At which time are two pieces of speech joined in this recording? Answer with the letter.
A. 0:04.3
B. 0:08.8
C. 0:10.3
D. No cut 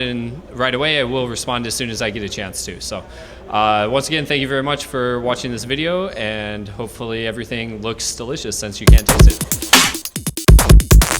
B